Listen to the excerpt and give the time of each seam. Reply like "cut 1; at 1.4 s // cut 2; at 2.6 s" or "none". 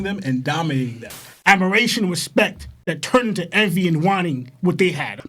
cut 1; at 1.3 s